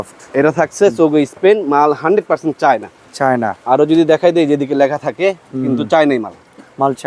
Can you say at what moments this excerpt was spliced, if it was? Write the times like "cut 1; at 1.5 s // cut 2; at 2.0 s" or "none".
none